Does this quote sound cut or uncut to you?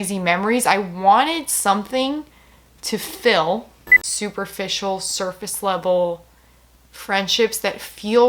cut